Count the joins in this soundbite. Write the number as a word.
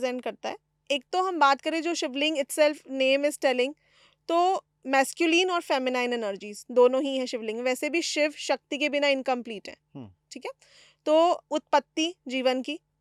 zero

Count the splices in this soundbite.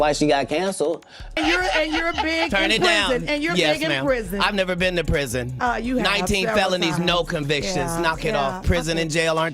one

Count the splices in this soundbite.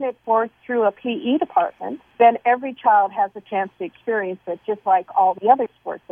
zero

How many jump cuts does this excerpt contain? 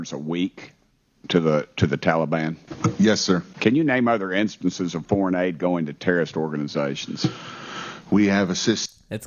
two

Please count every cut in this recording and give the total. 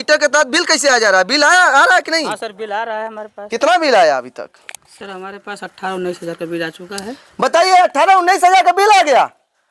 one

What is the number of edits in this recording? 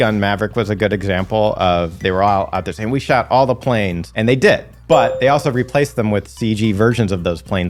zero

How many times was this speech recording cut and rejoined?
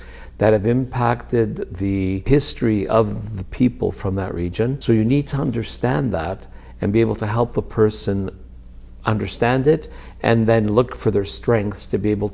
two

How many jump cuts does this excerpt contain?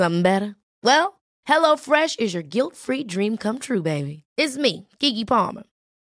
zero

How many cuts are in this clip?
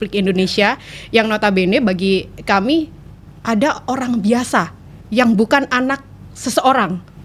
zero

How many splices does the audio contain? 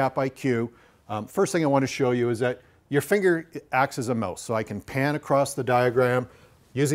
zero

